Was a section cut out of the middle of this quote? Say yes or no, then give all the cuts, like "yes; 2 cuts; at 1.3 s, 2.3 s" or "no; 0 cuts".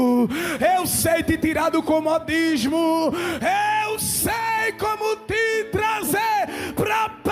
no; 0 cuts